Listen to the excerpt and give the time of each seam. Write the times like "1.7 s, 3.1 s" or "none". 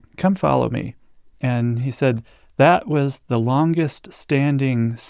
1.3 s